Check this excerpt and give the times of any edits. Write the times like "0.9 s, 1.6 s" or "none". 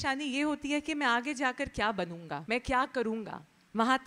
2.4 s